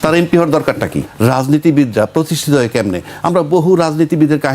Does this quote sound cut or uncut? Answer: cut